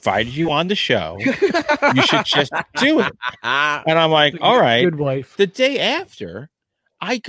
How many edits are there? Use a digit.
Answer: 1